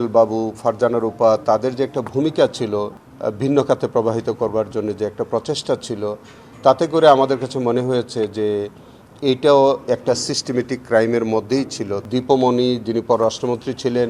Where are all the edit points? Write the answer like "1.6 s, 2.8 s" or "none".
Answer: 2.9 s, 12.0 s